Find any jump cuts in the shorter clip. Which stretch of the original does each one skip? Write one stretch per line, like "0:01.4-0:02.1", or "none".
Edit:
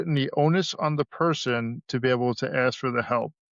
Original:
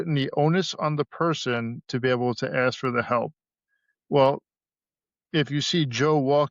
none